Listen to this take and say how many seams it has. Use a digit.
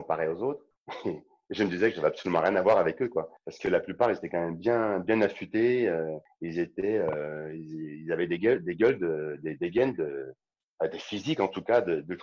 0